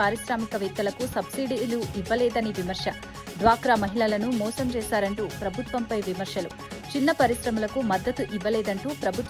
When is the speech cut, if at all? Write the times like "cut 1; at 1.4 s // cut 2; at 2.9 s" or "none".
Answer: none

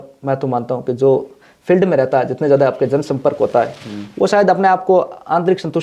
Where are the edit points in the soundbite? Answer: none

